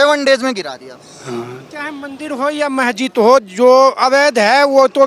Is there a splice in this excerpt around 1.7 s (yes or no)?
yes